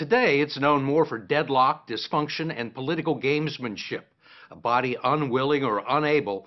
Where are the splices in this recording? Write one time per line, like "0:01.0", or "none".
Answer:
0:03.2